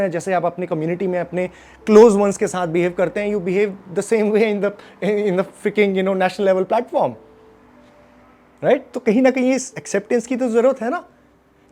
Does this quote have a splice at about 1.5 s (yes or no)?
no